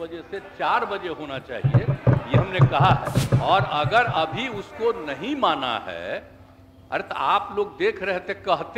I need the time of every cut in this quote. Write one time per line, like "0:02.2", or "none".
0:03.2